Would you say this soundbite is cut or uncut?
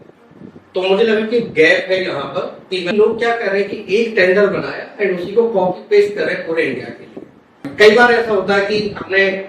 cut